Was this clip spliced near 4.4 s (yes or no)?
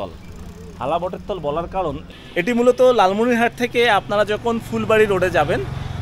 no